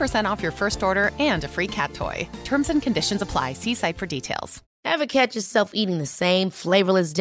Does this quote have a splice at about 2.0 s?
no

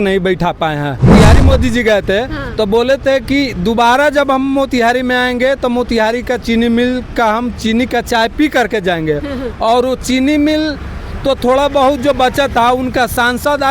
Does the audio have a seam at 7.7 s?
no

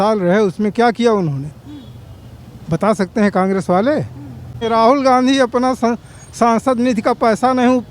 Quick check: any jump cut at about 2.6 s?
no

